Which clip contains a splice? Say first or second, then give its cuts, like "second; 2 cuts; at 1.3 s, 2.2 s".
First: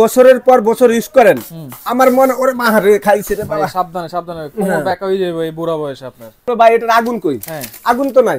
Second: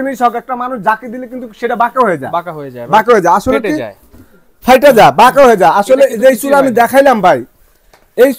first; 1 cut; at 6.5 s